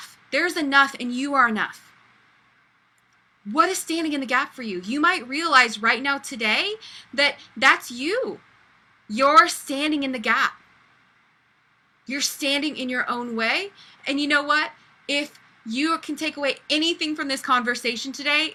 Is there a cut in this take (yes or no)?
no